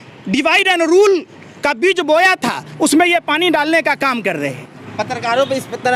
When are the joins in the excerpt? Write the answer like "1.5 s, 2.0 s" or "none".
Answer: 4.8 s